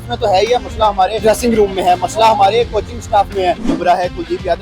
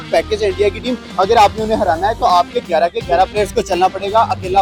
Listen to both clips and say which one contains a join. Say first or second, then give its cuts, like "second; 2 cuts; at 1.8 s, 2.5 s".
first; 2 cuts; at 1.2 s, 3.7 s